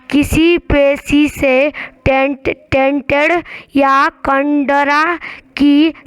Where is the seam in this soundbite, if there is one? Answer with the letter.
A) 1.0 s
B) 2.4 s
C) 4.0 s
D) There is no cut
A